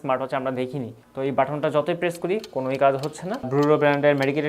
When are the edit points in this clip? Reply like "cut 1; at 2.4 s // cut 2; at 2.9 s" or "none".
cut 1; at 1.0 s // cut 2; at 3.5 s